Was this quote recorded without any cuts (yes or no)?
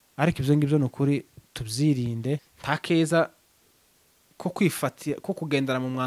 no